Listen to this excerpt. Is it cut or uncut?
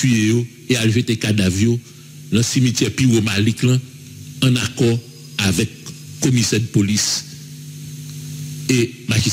uncut